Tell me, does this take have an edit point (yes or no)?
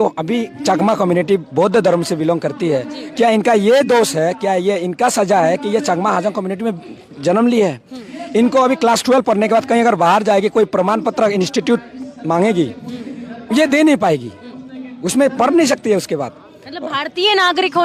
no